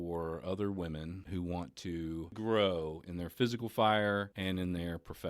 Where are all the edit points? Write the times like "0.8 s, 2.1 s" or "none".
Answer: 1.2 s, 2.3 s, 4.3 s